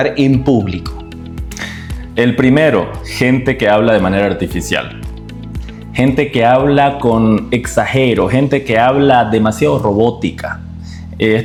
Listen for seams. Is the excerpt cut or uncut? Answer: uncut